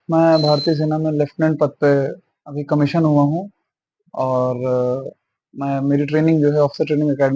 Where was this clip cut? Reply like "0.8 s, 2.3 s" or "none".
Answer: none